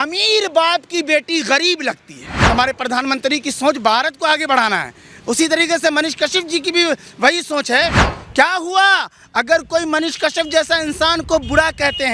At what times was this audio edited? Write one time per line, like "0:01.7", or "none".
0:02.3
0:08.0

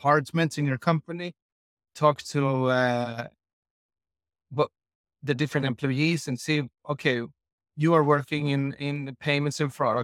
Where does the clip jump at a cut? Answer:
none

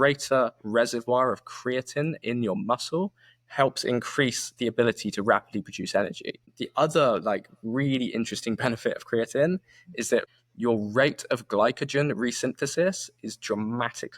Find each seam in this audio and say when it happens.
0:06.6
0:10.4

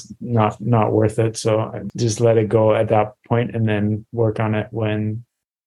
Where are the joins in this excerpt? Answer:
0:01.8

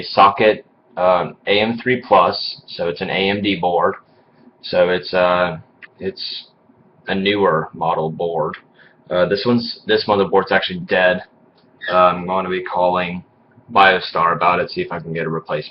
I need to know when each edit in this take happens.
0:10.3

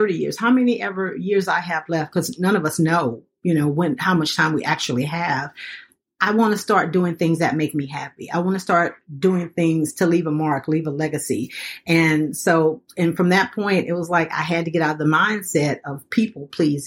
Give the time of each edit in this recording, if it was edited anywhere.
none

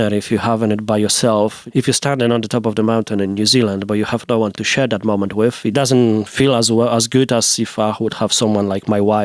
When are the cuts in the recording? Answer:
0:01.6
0:05.7

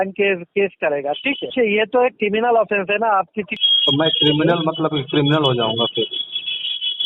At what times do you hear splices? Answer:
0:01.5
0:03.5

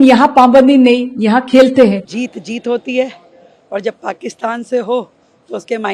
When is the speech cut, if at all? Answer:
0:02.1

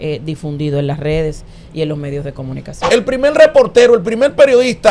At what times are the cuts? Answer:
0:02.7

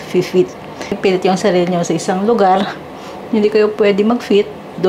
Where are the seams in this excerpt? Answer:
0:01.0

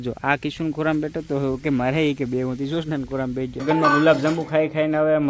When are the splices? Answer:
0:03.6

